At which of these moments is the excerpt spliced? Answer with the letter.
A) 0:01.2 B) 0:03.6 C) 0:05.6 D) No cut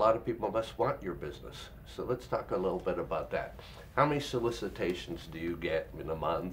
D